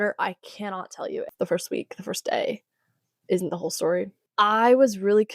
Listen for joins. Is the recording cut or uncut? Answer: cut